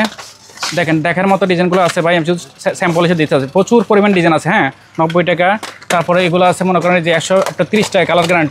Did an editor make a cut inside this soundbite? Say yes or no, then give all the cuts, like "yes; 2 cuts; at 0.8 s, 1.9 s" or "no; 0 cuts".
no; 0 cuts